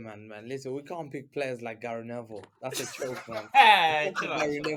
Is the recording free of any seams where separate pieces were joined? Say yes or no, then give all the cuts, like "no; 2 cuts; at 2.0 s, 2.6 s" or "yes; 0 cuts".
yes; 0 cuts